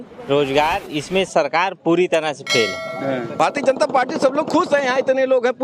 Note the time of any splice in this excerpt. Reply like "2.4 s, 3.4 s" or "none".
3.3 s